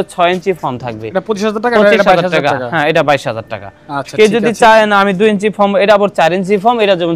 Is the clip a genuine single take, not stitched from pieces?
yes; 0 cuts

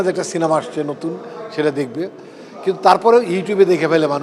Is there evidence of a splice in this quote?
no; 0 cuts

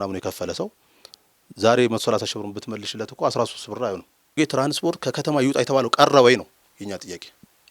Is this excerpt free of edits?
no; 1 cut; at 4.4 s

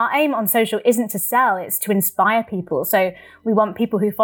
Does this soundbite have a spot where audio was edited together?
no; 0 cuts

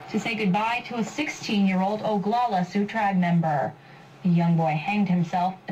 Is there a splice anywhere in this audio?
no; 0 cuts

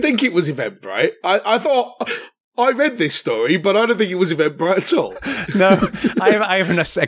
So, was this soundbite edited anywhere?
no; 0 cuts

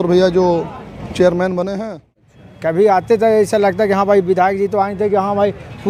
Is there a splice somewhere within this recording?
yes; 1 cut; at 2.4 s

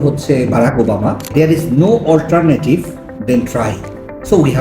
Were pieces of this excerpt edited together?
yes; 1 cut; at 1.2 s

